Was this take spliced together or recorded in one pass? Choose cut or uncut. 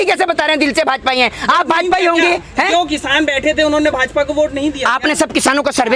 uncut